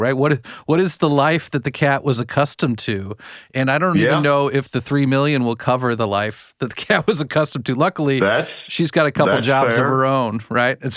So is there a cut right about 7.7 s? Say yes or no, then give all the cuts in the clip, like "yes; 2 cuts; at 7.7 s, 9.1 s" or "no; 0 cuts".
no; 0 cuts